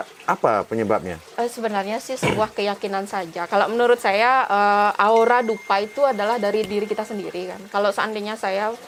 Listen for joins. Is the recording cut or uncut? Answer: uncut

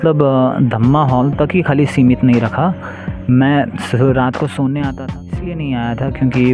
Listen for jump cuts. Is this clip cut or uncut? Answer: cut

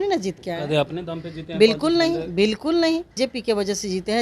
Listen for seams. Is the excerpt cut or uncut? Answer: cut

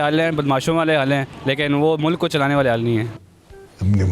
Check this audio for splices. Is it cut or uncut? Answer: cut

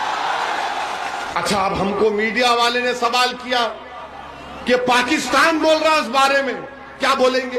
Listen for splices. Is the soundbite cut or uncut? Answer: cut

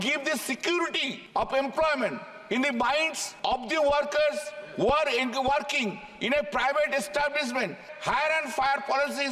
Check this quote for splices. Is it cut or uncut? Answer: cut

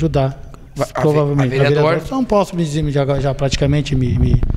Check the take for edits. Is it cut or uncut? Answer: uncut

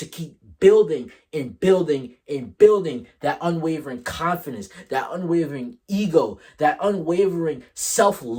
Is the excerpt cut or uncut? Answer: uncut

